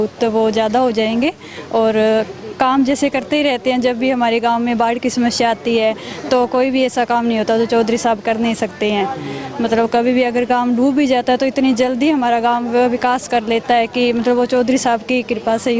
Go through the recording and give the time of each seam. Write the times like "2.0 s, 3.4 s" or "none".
none